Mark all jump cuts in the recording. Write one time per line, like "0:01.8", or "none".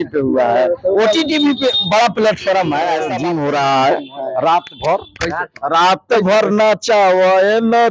0:03.1